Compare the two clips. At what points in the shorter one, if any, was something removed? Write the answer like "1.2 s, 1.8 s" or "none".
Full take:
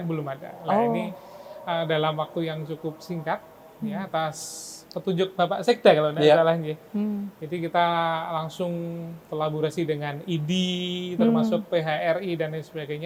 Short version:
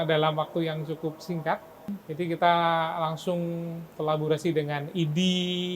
1.9 s